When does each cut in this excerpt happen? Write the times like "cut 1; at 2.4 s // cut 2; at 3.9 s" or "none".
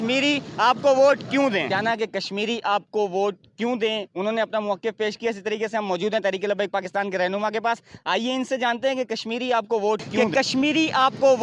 cut 1; at 1.7 s // cut 2; at 10.1 s